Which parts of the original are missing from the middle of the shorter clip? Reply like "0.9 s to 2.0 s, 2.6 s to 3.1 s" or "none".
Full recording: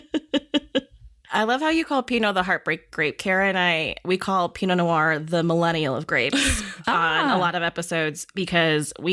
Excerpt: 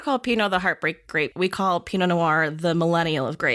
3.2 s to 4.0 s